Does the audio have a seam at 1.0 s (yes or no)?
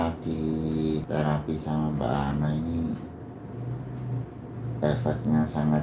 yes